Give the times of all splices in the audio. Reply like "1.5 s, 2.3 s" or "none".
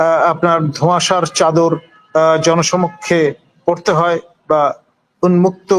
none